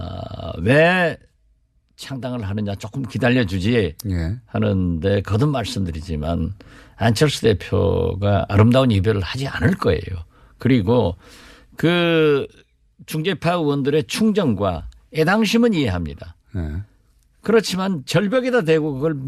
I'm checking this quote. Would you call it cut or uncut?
uncut